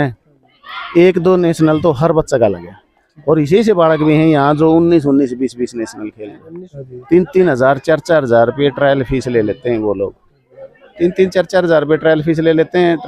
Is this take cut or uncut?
cut